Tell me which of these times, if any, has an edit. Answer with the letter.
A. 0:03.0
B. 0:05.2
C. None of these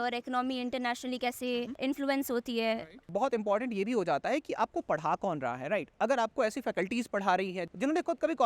A